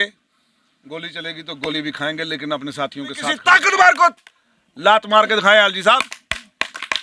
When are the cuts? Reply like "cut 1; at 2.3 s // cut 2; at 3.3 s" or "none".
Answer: cut 1; at 3.4 s